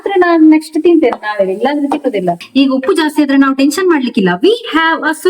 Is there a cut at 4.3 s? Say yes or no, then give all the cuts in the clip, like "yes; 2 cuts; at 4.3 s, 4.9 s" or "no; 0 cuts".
no; 1 cut; at 2.4 s